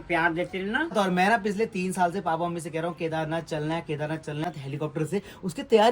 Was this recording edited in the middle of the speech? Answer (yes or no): yes